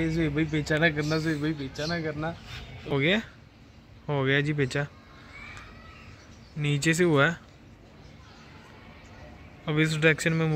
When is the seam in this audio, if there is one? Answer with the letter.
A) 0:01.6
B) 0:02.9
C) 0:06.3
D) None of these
B